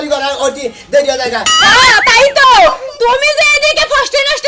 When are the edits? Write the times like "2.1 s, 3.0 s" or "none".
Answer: 1.6 s